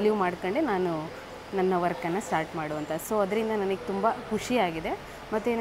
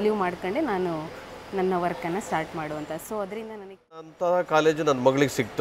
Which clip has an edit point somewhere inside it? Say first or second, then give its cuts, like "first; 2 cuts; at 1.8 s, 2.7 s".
second; 1 cut; at 4.1 s